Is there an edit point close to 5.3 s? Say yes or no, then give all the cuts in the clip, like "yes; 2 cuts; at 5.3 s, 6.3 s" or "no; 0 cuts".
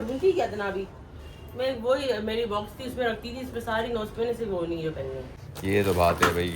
yes; 1 cut; at 5.3 s